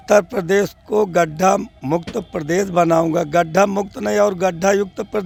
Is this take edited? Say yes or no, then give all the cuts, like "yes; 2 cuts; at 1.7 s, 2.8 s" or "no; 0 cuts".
no; 0 cuts